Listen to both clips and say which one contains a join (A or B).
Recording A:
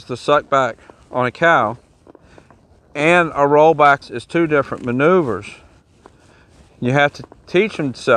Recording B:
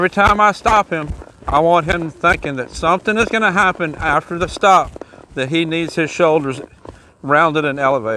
A